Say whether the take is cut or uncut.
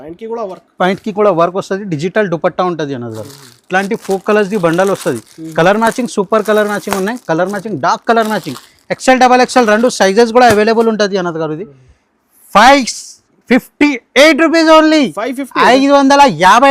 uncut